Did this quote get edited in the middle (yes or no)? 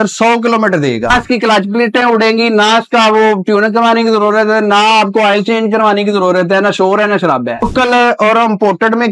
yes